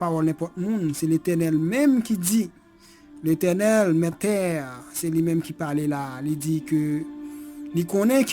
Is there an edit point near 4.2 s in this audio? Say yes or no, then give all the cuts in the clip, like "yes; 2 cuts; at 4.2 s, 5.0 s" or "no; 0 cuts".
yes; 1 cut; at 4.2 s